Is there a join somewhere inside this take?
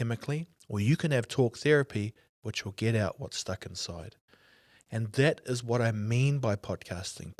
no; 0 cuts

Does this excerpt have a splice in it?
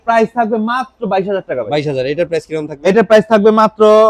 no; 0 cuts

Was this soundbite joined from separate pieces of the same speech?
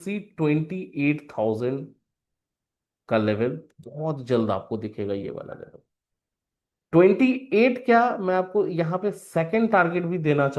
no; 0 cuts

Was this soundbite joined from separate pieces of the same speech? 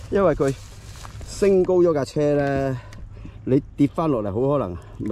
no; 0 cuts

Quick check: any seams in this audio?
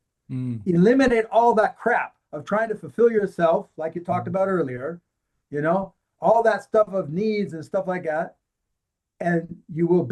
no; 0 cuts

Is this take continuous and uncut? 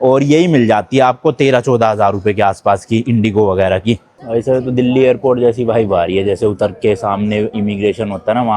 no; 1 cut; at 4.1 s

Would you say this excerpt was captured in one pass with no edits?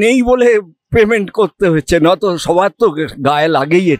yes; 0 cuts

